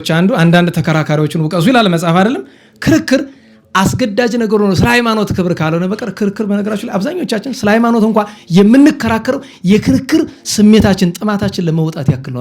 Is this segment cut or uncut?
uncut